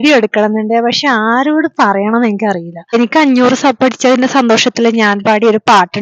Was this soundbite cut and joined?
yes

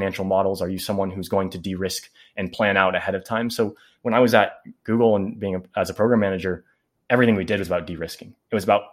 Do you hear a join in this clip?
no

